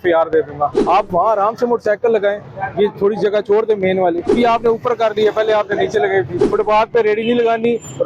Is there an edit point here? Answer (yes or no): yes